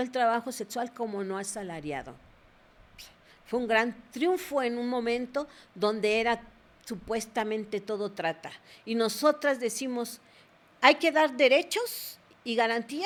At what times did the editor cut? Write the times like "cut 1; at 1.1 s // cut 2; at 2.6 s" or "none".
none

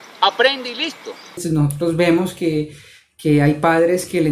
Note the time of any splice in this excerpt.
cut 1; at 1.4 s

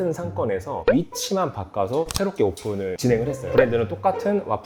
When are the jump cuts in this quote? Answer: none

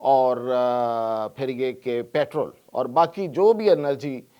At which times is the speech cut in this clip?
cut 1; at 2.6 s

